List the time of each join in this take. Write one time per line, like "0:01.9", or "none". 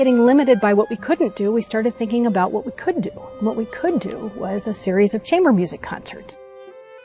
none